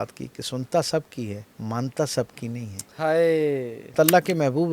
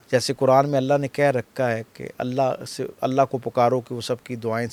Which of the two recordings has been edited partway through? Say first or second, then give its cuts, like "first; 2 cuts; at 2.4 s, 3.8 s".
first; 2 cuts; at 1.5 s, 3.9 s